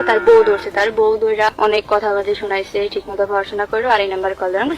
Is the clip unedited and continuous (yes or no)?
no